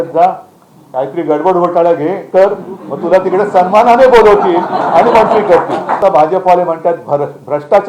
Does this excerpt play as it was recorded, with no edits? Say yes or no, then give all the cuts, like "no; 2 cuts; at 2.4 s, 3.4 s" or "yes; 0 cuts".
no; 1 cut; at 6.0 s